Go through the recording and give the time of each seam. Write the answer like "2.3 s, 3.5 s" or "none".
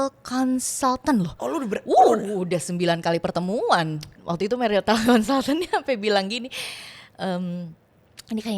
4.2 s